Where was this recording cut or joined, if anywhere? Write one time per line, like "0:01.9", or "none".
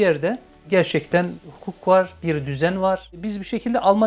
0:01.3
0:03.2